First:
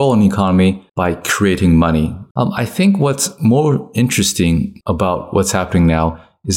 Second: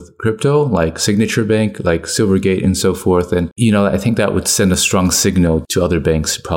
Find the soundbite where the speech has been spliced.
first; 3 cuts; at 0.9 s, 2.2 s, 4.8 s

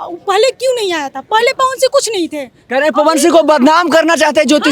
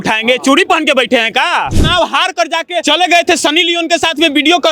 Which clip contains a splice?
second; 2 cuts; at 1.8 s, 2.8 s

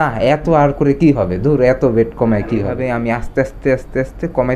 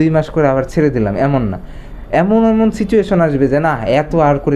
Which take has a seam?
first; 1 cut; at 2.8 s

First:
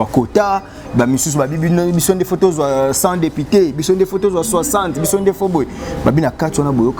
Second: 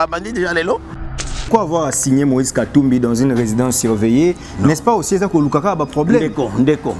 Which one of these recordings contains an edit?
second; 1 cut; at 0.9 s

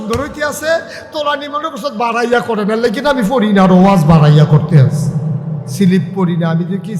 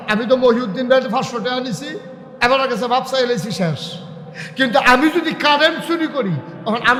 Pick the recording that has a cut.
first; 1 cut; at 5.6 s

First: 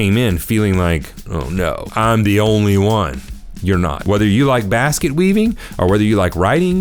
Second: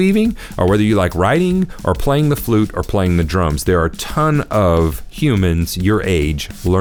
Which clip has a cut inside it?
first; 2 cuts; at 1.8 s, 4.0 s

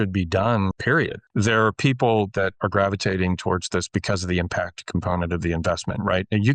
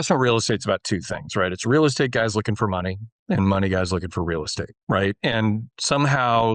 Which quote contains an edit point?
first; 2 cuts; at 0.8 s, 2.5 s

